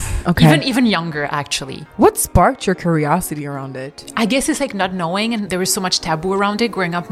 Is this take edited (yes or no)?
yes